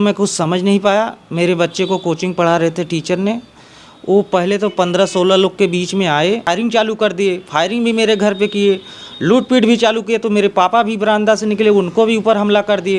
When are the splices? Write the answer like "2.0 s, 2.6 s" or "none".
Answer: 6.4 s